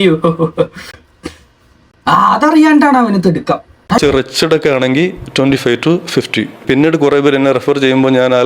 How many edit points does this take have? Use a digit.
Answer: 2